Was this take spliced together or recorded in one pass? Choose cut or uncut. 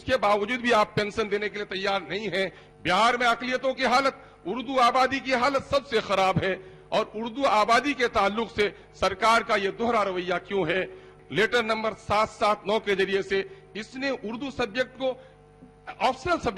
cut